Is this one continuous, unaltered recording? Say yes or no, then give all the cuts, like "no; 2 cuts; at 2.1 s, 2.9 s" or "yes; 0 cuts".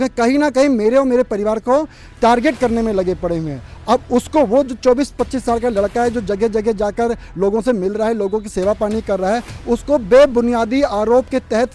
yes; 0 cuts